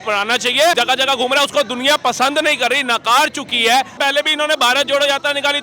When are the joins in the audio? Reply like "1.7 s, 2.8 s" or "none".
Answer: 0.8 s, 4.0 s